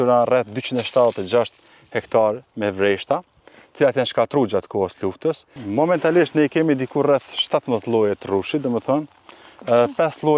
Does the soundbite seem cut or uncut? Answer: cut